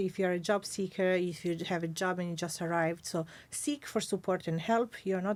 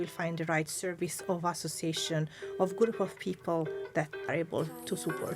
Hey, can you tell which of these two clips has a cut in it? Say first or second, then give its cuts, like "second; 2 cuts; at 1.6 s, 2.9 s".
second; 1 cut; at 4.3 s